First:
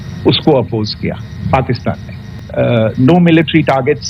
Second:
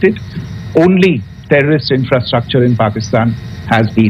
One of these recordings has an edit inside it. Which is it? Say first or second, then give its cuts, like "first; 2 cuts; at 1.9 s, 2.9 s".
first; 1 cut; at 2.4 s